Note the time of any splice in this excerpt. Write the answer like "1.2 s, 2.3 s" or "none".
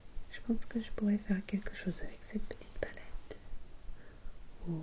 none